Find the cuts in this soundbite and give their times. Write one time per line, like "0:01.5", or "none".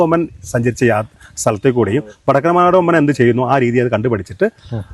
none